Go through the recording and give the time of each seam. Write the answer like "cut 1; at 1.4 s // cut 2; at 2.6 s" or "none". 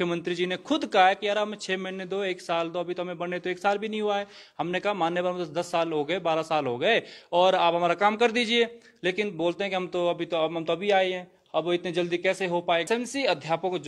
cut 1; at 12.9 s